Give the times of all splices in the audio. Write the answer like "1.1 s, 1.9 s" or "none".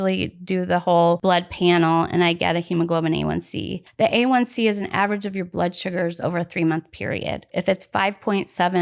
1.2 s, 3.8 s, 7.5 s